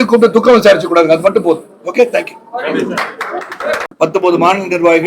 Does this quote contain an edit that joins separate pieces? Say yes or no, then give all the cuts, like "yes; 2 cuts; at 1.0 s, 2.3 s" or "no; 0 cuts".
yes; 1 cut; at 3.9 s